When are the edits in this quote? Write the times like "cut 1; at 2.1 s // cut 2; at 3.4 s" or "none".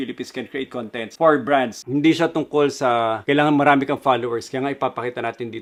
none